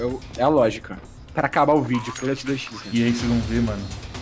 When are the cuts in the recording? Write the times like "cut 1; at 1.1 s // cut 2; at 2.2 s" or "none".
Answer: cut 1; at 0.9 s